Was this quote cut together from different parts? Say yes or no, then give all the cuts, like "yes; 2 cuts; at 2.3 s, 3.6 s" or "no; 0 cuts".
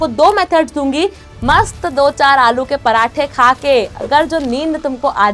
yes; 1 cut; at 1.2 s